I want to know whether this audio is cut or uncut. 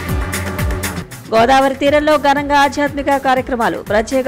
cut